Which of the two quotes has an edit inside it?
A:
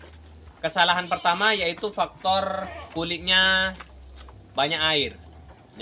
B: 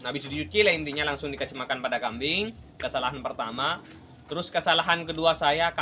A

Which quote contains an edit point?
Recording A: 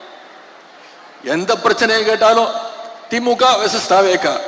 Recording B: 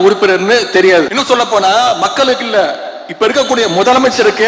B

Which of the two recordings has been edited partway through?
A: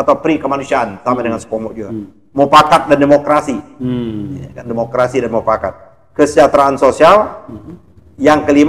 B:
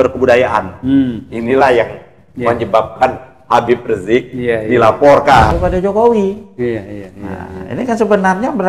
B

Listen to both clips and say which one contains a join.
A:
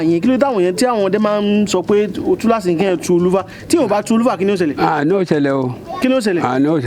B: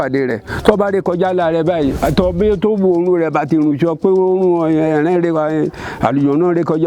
B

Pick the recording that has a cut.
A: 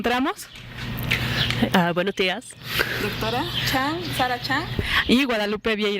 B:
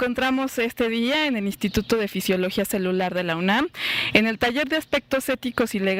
A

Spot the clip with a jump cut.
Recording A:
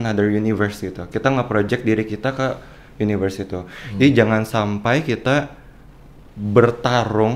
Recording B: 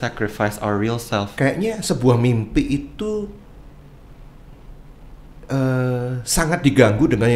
B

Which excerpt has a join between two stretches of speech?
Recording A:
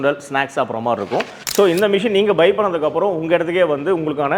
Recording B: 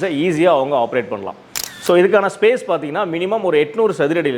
A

